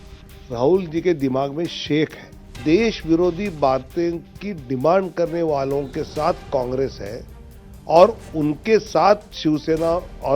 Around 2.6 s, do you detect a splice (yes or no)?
yes